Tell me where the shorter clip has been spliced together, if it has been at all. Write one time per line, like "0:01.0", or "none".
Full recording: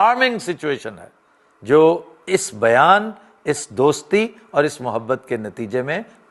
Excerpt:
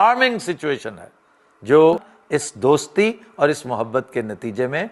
0:02.1